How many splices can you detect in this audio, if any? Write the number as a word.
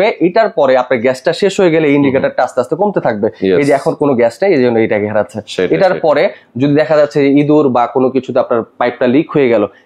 zero